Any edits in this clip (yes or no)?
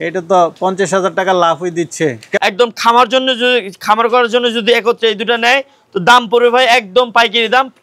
yes